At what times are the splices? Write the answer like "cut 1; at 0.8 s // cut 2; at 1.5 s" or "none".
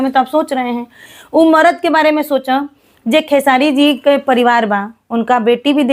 none